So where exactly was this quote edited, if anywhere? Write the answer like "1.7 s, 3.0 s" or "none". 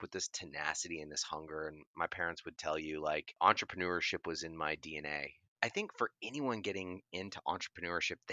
3.3 s, 5.5 s